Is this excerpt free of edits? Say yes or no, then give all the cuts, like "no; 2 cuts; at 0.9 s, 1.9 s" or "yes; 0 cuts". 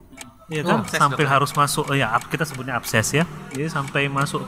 yes; 0 cuts